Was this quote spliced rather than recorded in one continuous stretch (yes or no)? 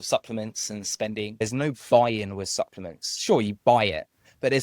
yes